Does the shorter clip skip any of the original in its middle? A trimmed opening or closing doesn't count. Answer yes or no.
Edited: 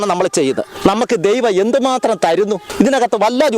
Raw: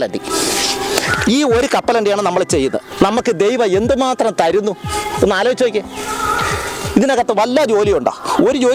yes